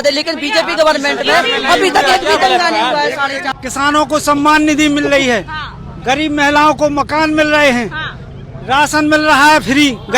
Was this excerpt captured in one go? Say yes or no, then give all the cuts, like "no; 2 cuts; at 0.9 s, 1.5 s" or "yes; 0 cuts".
no; 1 cut; at 3.5 s